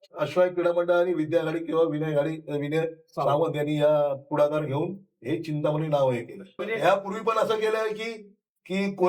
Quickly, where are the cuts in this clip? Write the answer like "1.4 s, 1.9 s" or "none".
6.6 s

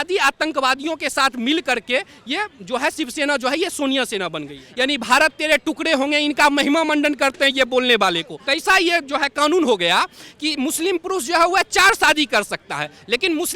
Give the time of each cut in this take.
4.6 s, 8.4 s

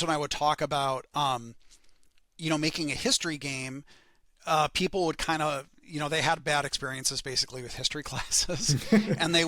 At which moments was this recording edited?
none

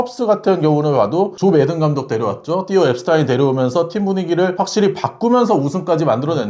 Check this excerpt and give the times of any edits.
none

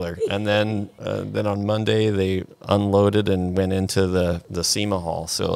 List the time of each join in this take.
0.9 s, 4.5 s

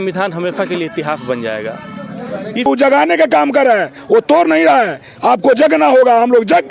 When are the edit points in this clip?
2.7 s

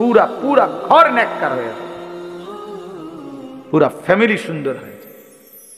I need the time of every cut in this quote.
2.1 s, 3.7 s

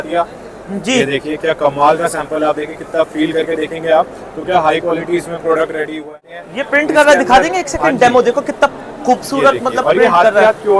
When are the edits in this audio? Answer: 6.3 s

